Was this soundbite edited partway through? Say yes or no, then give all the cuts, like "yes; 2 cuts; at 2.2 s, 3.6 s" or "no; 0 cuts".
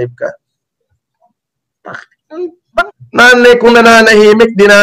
yes; 1 cut; at 3.0 s